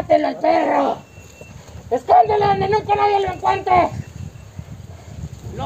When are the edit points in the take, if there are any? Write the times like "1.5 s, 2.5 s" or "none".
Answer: none